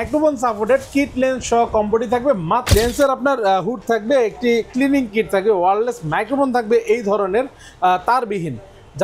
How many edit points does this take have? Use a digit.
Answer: 1